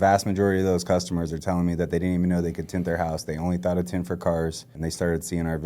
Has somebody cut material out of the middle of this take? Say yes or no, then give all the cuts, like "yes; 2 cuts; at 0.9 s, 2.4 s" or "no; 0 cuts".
yes; 1 cut; at 4.7 s